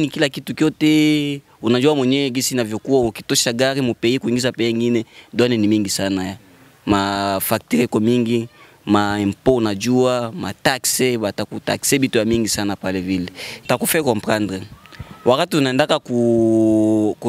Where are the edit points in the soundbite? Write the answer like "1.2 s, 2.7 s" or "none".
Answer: none